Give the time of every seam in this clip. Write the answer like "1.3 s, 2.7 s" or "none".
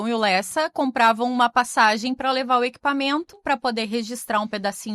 3.4 s

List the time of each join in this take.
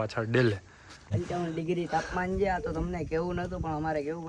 1.1 s

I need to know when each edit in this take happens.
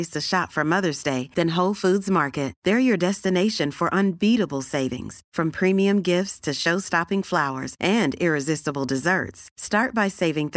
none

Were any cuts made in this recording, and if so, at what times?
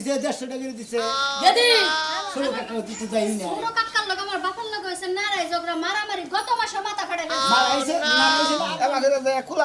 2.2 s, 8.7 s

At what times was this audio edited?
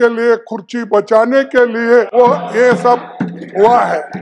2.1 s

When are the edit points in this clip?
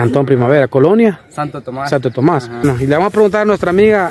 2.6 s

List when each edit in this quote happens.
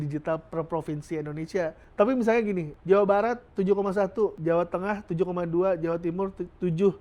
1.8 s, 2.7 s, 4.4 s

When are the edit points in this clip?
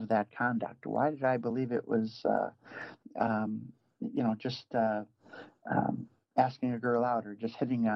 none

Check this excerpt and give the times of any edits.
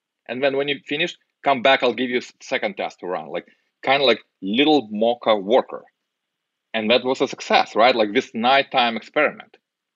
none

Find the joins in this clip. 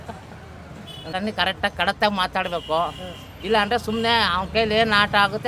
1.1 s

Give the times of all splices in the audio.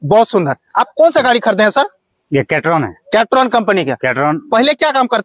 none

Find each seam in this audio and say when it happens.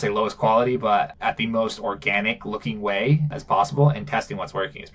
1.1 s, 3.3 s

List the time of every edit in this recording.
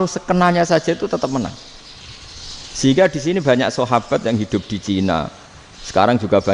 none

